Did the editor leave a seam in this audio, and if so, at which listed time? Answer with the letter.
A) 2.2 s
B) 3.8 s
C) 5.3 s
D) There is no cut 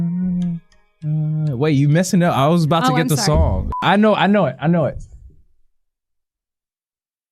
B